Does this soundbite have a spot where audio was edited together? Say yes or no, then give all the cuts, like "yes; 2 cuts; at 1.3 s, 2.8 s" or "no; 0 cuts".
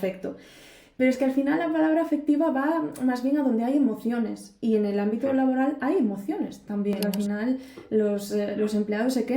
yes; 1 cut; at 7.1 s